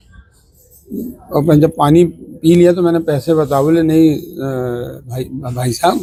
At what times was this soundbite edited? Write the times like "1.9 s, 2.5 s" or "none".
none